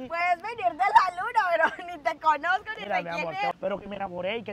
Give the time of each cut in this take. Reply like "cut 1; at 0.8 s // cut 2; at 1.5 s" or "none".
cut 1; at 3.5 s